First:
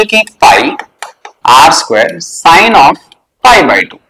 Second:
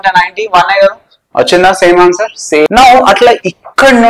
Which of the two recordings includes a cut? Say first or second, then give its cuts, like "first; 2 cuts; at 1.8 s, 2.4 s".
second; 1 cut; at 2.7 s